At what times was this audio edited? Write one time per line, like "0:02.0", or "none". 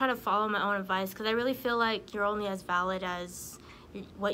none